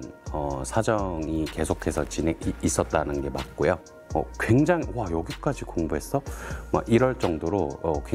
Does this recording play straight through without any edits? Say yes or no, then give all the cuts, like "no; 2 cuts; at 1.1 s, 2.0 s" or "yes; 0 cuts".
no; 1 cut; at 3.8 s